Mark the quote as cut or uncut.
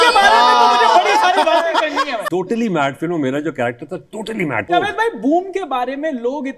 cut